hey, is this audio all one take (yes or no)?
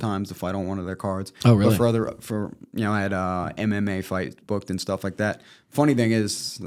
yes